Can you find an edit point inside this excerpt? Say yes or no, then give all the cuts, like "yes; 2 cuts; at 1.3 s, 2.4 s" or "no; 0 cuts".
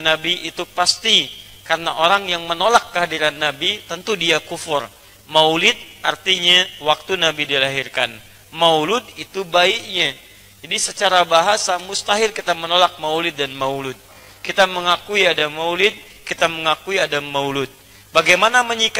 no; 0 cuts